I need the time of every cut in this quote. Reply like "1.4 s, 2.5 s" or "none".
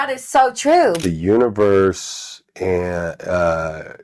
1.0 s